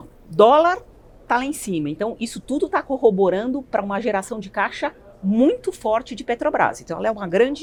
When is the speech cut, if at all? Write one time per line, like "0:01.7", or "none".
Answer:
none